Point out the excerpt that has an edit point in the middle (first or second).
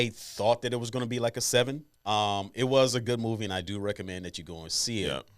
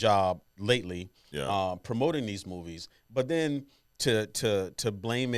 first